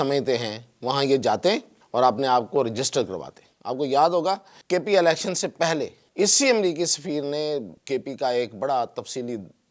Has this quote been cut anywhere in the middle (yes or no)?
yes